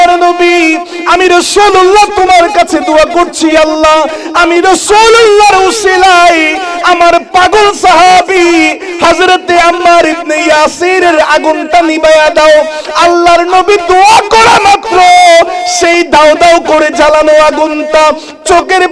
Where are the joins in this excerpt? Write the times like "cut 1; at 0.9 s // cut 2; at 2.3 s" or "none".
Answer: none